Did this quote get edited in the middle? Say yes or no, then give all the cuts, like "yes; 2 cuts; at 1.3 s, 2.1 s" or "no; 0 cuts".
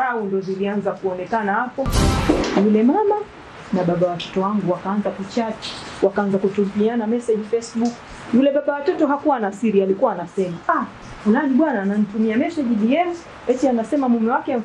yes; 1 cut; at 2.1 s